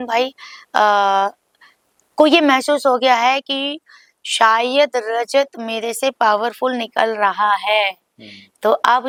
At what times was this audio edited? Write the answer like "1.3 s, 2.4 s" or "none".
none